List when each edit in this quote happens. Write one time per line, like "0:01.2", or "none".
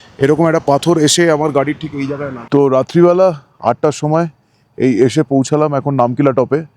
0:02.3